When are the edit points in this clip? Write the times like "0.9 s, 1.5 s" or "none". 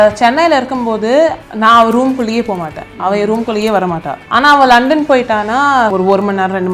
1.5 s, 4.1 s, 5.9 s